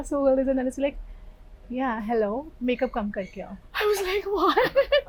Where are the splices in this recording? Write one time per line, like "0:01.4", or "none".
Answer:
none